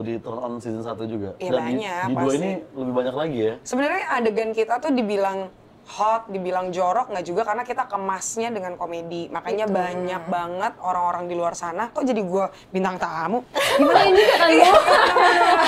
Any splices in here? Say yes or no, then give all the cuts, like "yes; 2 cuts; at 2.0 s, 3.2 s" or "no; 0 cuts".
no; 0 cuts